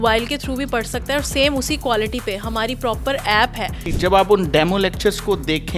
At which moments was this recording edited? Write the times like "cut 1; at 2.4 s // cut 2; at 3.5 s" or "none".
cut 1; at 3.8 s